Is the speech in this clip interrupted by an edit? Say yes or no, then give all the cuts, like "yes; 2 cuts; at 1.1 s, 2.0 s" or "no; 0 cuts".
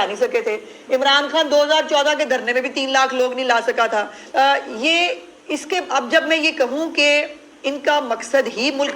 yes; 1 cut; at 4.2 s